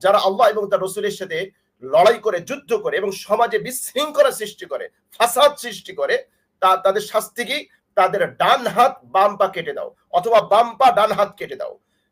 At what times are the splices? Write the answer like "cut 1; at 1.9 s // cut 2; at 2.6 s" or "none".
none